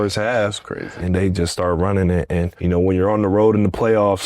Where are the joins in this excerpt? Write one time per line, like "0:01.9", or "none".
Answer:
0:00.9
0:02.5